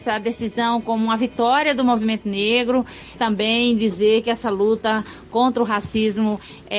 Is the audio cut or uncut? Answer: cut